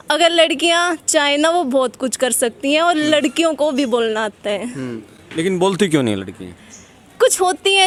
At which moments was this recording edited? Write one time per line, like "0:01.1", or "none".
none